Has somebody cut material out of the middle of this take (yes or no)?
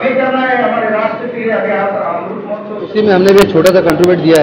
yes